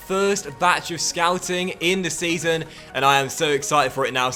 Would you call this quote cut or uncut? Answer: uncut